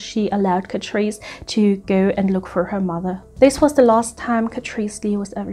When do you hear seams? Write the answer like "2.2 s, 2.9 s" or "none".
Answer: 3.2 s